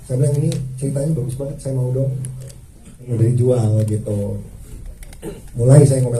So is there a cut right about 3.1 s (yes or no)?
yes